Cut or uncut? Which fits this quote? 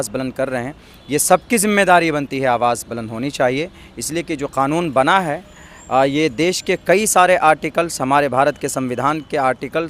uncut